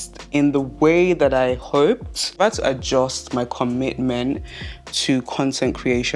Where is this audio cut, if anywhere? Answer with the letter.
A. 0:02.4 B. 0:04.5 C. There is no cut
A